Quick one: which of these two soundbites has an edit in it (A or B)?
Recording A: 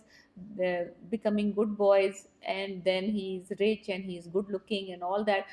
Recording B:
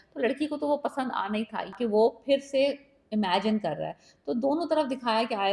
B